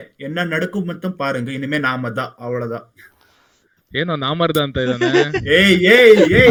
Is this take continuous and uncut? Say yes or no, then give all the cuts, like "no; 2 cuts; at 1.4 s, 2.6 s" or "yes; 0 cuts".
yes; 0 cuts